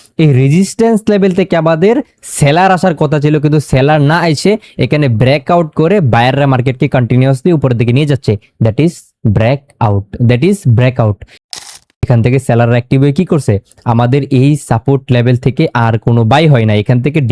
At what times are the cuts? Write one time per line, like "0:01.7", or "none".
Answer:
0:11.7